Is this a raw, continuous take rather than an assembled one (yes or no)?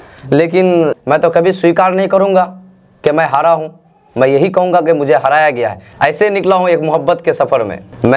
no